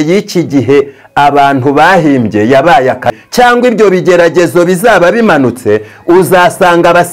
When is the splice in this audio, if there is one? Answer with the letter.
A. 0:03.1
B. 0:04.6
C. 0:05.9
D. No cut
A